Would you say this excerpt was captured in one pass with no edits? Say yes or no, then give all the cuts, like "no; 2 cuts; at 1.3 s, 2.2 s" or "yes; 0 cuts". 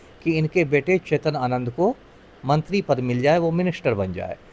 yes; 0 cuts